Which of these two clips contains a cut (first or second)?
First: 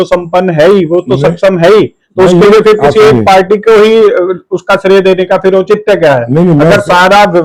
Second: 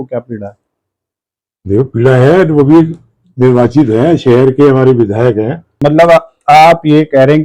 second